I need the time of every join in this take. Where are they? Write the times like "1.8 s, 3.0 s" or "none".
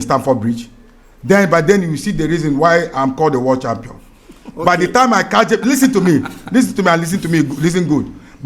none